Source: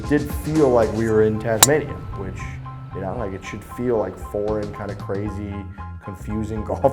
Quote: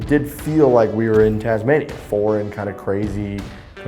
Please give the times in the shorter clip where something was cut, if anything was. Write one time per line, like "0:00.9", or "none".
0:02.0